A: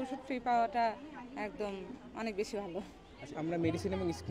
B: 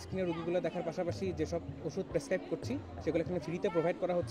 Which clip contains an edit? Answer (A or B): A